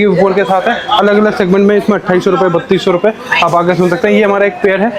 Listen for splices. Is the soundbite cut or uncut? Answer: uncut